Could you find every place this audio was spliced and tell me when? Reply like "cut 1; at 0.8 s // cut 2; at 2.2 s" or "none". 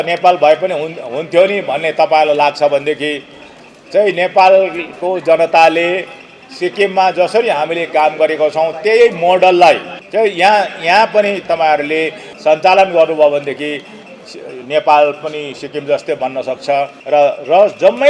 cut 1; at 10.0 s // cut 2; at 12.2 s // cut 3; at 17.0 s